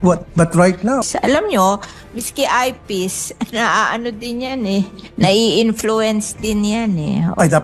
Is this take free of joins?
no; 1 cut; at 1.0 s

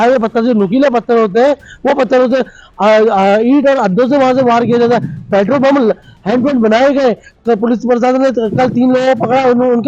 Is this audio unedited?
yes; 0 cuts

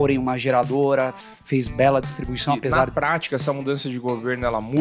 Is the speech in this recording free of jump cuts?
no; 1 cut; at 2.9 s

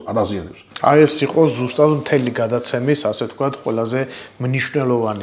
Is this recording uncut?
yes; 0 cuts

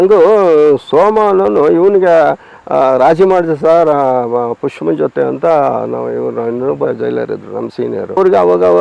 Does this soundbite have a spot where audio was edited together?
no; 0 cuts

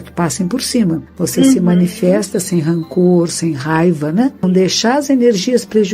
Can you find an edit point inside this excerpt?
yes; 2 cuts; at 1.1 s, 4.4 s

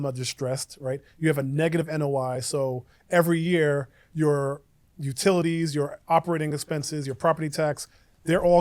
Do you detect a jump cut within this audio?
no; 0 cuts

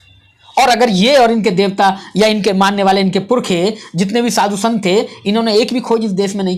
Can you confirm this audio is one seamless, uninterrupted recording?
yes; 0 cuts

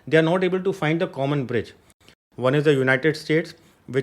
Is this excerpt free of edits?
no; 1 cut; at 2.1 s

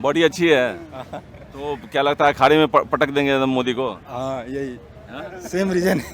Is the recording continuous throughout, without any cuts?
yes; 0 cuts

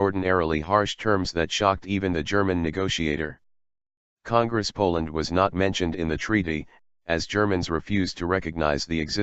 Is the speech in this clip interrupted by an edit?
no; 0 cuts

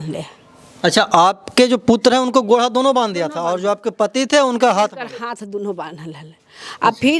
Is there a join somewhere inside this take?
no; 0 cuts

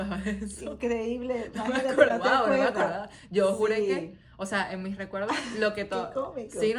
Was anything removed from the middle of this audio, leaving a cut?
no; 0 cuts

